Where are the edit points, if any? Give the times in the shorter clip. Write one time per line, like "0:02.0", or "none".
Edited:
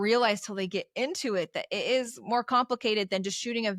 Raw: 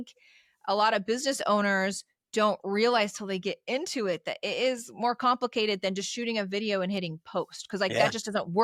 none